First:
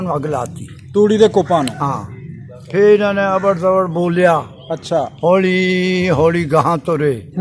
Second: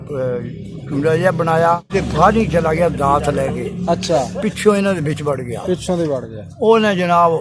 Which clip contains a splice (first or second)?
second